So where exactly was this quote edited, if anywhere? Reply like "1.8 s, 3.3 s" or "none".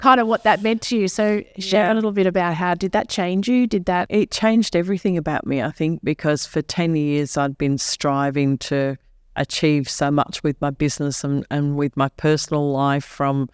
4.1 s